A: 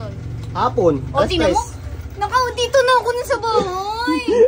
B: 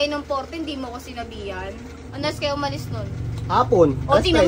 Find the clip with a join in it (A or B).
B